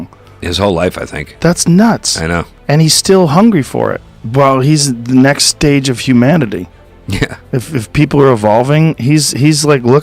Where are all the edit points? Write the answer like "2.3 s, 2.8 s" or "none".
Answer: 4.0 s